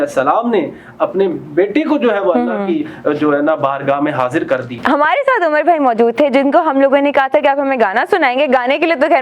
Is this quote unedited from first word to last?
no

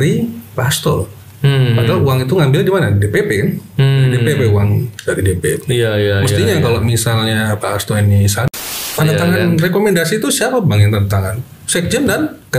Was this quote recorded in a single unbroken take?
no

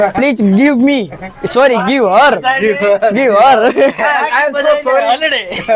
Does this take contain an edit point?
no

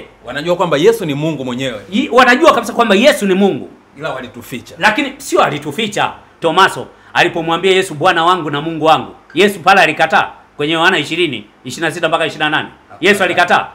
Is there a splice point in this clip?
yes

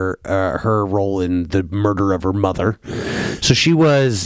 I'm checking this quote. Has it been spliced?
no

